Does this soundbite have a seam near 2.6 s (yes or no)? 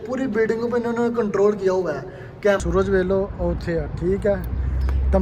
yes